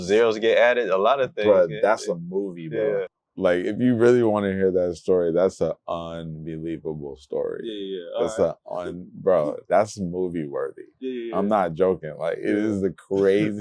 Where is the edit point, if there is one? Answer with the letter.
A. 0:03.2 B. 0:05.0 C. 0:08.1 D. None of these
A